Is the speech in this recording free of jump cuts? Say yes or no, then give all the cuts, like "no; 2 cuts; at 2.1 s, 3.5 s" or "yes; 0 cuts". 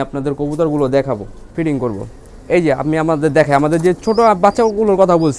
no; 1 cut; at 1.4 s